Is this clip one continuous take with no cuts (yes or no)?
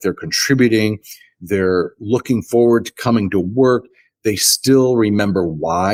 yes